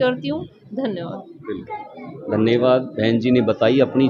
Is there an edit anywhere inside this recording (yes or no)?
no